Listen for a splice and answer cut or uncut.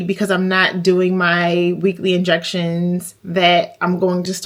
uncut